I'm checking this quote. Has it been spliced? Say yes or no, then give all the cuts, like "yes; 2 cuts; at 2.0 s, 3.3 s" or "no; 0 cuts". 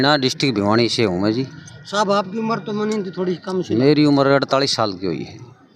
no; 0 cuts